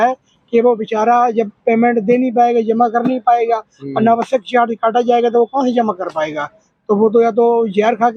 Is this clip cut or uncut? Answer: uncut